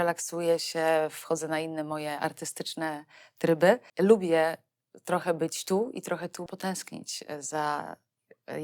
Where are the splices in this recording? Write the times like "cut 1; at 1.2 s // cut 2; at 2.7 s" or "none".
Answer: cut 1; at 3.9 s // cut 2; at 6.5 s

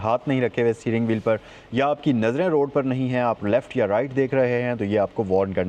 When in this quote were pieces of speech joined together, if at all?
none

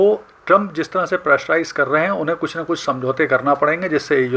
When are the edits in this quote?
none

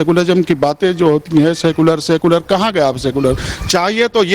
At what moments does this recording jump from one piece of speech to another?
none

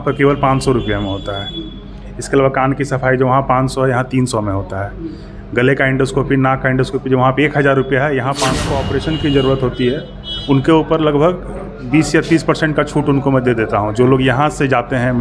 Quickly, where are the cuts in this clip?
cut 1; at 8.6 s

